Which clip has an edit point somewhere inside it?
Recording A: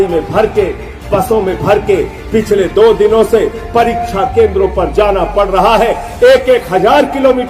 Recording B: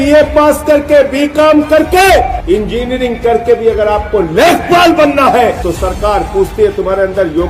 B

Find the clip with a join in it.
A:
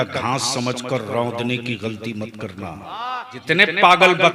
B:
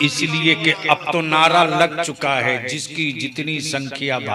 A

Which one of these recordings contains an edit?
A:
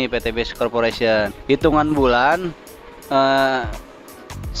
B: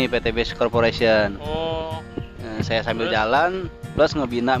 A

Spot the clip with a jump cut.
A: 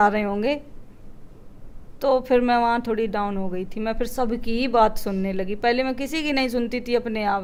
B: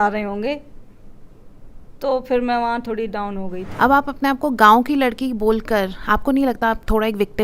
B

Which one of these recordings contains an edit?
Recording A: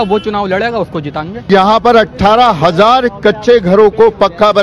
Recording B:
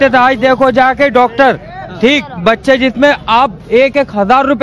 A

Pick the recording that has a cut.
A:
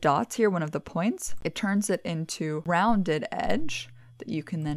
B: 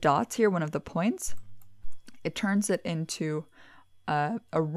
A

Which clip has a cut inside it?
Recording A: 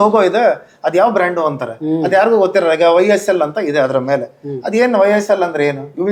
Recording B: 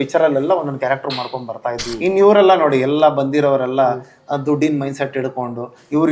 B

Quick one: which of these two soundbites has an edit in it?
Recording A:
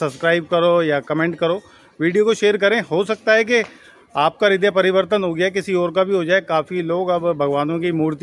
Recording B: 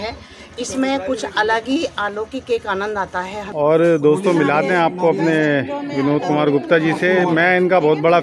B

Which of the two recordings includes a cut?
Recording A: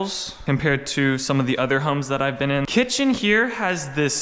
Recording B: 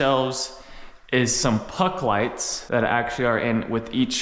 A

